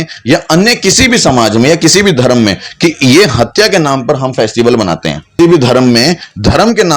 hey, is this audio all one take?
no; 1 cut; at 5.4 s

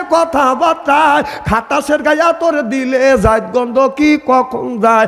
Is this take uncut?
yes; 0 cuts

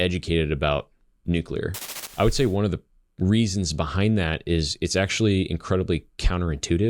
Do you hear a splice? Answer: yes; 1 cut; at 2.0 s

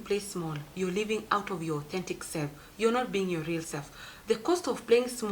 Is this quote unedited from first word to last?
no; 1 cut; at 4.1 s

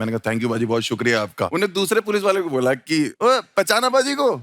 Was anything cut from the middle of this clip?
yes; 2 cuts; at 1.5 s, 3.1 s

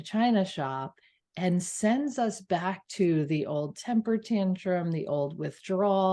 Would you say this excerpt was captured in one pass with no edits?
yes; 0 cuts

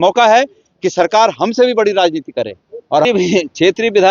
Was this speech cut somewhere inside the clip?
yes; 1 cut; at 3.0 s

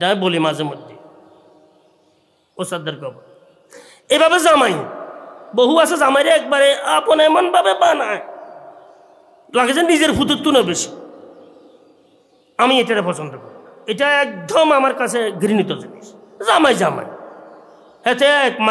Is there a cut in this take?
no; 0 cuts

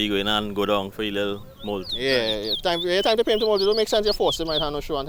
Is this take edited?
no; 0 cuts

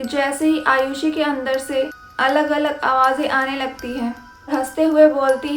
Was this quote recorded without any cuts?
no; 1 cut; at 4.5 s

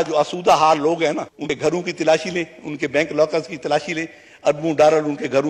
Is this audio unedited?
no; 1 cut; at 1.4 s

